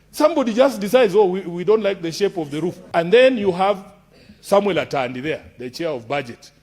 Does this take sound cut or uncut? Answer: cut